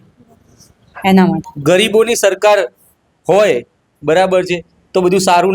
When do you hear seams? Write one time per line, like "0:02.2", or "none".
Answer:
0:01.5

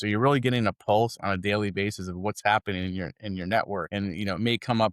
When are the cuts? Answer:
0:03.9

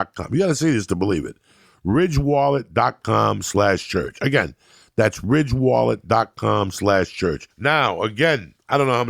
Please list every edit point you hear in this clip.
0:07.5

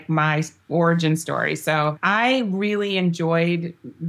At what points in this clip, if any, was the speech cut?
0:02.0

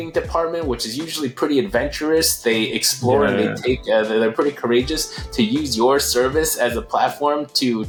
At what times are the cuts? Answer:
none

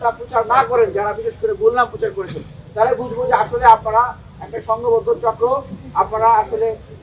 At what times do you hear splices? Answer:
none

